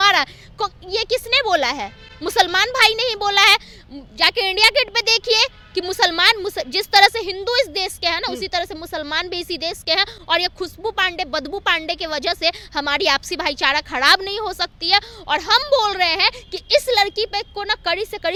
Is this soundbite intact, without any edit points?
yes; 0 cuts

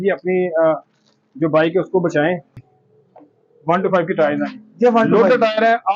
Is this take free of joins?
no; 1 cut; at 2.5 s

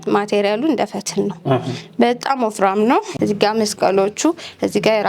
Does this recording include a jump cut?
yes; 1 cut; at 3.1 s

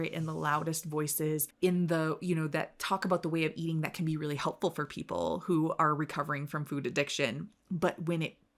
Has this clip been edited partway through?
no; 0 cuts

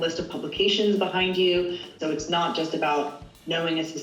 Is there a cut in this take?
yes; 1 cut; at 2.0 s

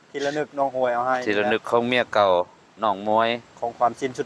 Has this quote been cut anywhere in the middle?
no; 0 cuts

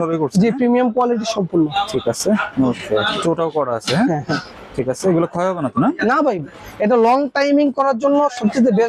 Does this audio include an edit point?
no; 0 cuts

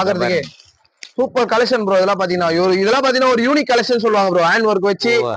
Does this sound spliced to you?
no; 0 cuts

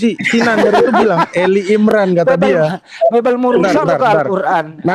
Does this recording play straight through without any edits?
yes; 0 cuts

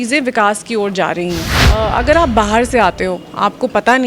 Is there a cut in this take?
yes; 1 cut; at 1.6 s

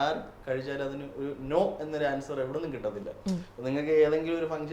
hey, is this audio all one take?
yes; 0 cuts

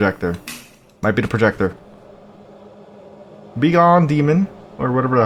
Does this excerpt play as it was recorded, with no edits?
yes; 0 cuts

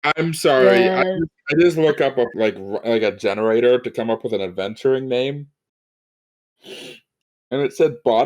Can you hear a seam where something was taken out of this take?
yes; 1 cut; at 2.3 s

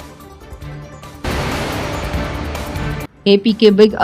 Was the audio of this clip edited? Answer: yes; 2 cuts; at 1.2 s, 2.8 s

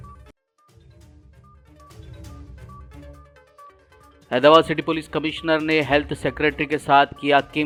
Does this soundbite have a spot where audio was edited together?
no; 0 cuts

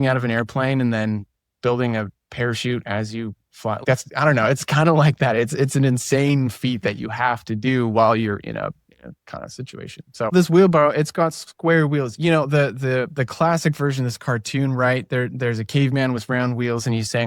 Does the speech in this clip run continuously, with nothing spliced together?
no; 3 cuts; at 2.2 s, 3.8 s, 10.3 s

